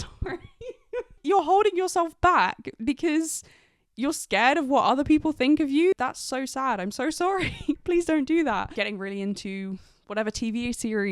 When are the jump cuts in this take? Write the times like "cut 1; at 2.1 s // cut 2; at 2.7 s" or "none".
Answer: cut 1; at 1.2 s // cut 2; at 6.0 s // cut 3; at 7.8 s // cut 4; at 8.7 s

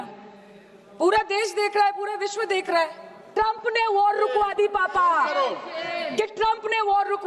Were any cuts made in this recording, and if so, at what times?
cut 1; at 3.3 s

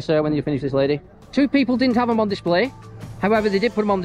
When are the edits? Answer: cut 1; at 1.1 s

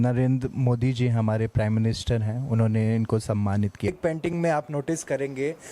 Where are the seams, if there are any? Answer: cut 1; at 3.9 s

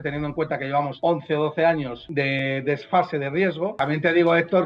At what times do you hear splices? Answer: cut 1; at 0.9 s // cut 2; at 2.0 s // cut 3; at 3.7 s

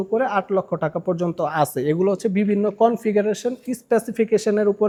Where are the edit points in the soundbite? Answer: none

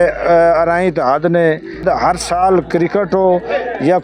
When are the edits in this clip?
cut 1; at 1.8 s

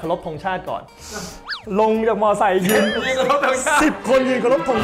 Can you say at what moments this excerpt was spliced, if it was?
none

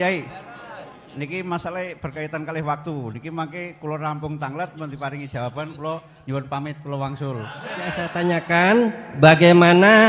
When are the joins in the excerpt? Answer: cut 1; at 8.1 s

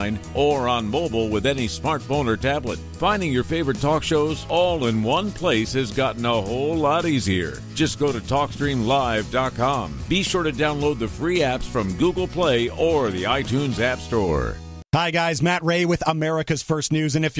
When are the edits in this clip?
cut 1; at 14.7 s

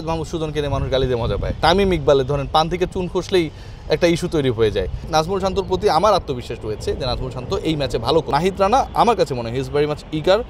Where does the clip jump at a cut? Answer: cut 1; at 1.6 s // cut 2; at 5.1 s // cut 3; at 8.3 s

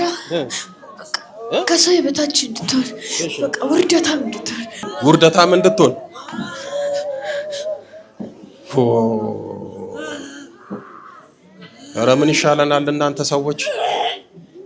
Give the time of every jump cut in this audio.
cut 1; at 4.8 s

